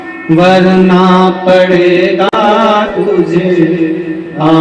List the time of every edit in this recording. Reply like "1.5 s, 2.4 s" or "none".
none

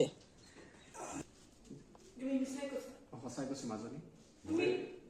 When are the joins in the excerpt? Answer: 1.2 s

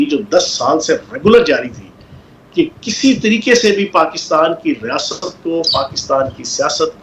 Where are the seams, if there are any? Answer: none

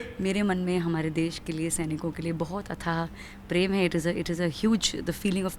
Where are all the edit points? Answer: none

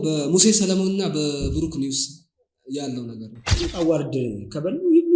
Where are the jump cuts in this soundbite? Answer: 3.4 s

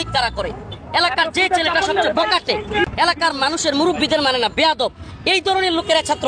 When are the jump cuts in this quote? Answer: 2.9 s

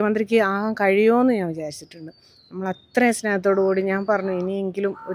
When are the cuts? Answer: none

